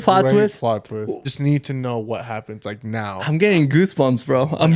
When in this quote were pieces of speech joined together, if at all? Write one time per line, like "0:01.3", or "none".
0:01.3